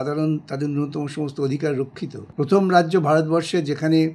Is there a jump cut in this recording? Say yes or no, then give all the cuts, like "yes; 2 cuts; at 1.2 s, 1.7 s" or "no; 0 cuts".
yes; 1 cut; at 2.2 s